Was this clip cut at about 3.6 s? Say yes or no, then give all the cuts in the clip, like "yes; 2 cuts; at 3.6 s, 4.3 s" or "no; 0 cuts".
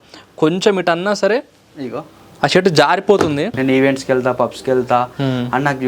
yes; 1 cut; at 3.6 s